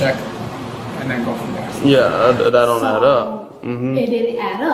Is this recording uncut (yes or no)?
no